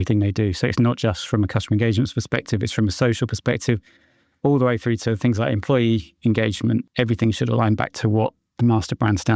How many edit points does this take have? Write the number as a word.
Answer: two